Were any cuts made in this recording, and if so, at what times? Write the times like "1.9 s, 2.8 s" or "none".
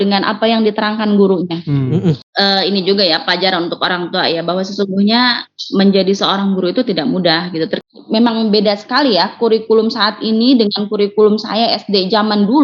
2.3 s, 7.8 s